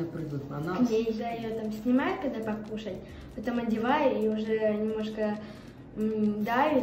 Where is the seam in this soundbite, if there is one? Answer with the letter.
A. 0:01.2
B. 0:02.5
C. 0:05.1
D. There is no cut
A